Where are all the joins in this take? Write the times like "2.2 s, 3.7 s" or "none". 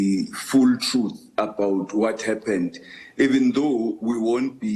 none